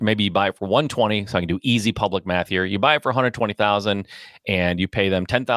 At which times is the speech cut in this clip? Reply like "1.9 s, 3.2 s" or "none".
none